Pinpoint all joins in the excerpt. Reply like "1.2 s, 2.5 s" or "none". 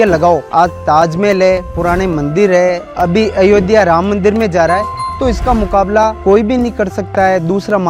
none